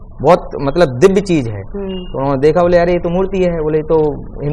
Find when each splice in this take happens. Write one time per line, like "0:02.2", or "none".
none